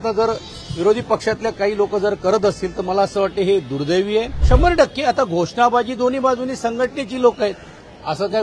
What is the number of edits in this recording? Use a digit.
1